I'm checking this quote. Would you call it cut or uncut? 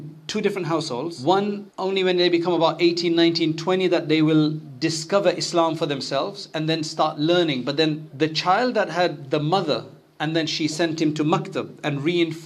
cut